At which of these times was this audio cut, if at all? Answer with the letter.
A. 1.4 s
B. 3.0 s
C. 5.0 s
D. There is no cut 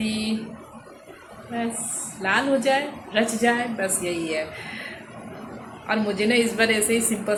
D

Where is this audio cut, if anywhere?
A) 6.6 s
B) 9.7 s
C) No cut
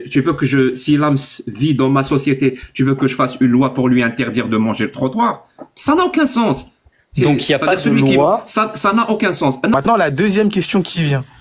B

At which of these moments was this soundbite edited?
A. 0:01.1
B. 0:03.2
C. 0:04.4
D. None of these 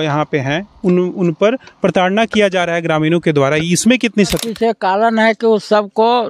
C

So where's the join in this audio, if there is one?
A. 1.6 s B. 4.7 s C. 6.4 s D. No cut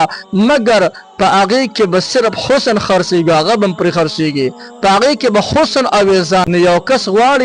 C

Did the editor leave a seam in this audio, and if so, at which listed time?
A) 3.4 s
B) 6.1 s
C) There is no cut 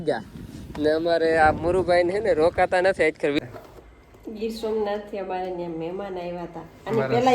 A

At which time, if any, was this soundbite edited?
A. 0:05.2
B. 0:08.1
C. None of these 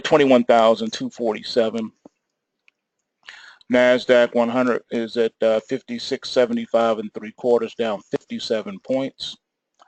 C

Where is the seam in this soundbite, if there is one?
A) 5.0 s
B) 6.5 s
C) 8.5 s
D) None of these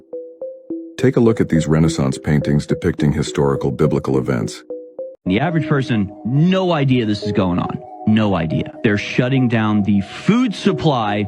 A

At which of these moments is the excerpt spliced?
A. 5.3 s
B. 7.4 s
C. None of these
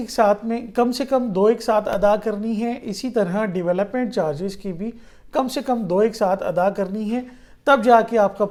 C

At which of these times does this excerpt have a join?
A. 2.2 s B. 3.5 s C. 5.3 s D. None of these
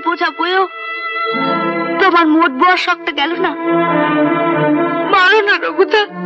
D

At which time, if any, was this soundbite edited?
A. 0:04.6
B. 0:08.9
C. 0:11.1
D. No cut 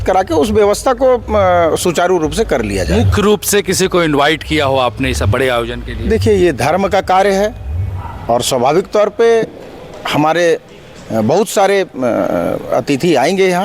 D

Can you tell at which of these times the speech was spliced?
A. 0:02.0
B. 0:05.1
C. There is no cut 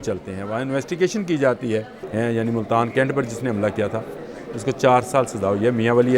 A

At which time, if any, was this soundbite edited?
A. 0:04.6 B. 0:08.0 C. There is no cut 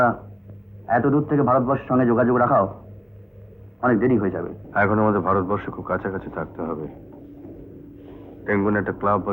A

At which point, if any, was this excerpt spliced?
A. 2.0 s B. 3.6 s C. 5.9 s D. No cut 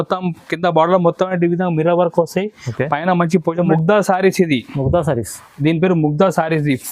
B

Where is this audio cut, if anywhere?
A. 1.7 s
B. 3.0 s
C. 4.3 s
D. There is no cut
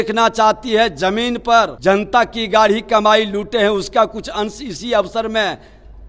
A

